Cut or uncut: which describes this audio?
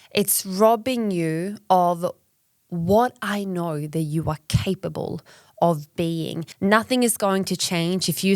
cut